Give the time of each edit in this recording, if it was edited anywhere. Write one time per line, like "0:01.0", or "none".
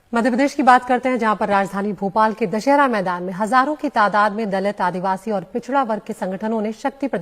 0:01.4